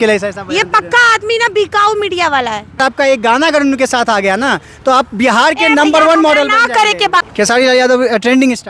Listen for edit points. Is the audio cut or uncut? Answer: cut